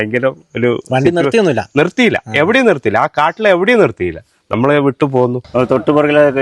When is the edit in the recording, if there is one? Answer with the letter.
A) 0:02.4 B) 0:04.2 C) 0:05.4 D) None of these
C